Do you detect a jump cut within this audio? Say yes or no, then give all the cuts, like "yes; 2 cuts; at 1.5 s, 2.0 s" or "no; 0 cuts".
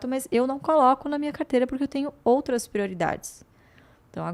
no; 0 cuts